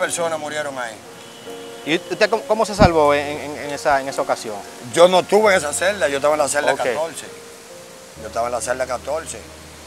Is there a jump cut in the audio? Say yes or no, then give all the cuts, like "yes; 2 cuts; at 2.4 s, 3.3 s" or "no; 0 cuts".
no; 0 cuts